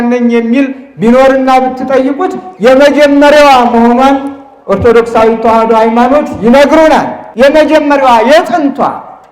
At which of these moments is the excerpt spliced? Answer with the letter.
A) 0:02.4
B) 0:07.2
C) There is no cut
B